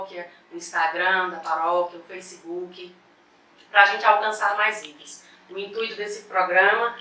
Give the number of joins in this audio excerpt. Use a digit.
0